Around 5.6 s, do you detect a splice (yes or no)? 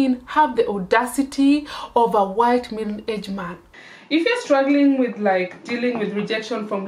no